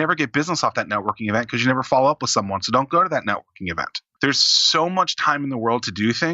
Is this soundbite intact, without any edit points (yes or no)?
no